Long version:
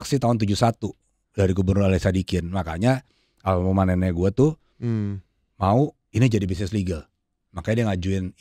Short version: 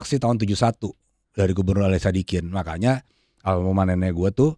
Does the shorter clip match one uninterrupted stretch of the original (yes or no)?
yes